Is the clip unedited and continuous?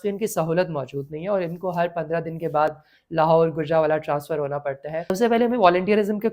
no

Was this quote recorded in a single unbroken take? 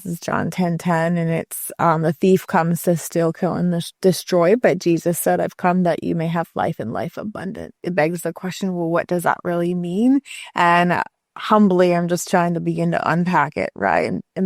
no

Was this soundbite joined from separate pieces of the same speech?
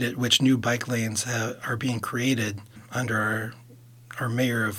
yes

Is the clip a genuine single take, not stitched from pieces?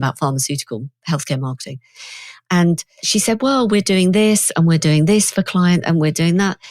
no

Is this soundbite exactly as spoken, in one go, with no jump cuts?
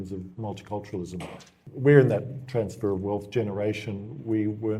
no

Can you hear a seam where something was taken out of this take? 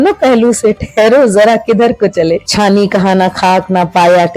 yes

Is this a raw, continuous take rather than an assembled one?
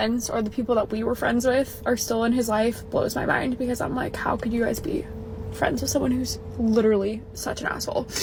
yes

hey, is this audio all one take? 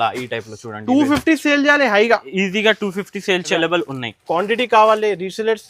no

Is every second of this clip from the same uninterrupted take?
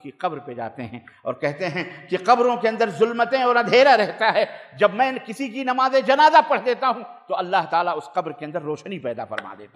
yes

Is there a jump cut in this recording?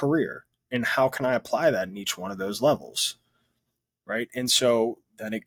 no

